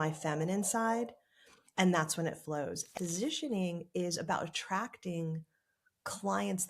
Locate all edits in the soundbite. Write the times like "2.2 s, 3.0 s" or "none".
2.9 s